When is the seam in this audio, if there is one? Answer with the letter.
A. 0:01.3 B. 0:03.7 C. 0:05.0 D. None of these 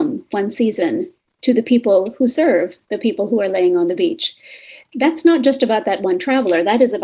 D